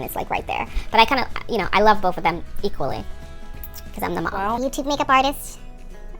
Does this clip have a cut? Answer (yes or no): yes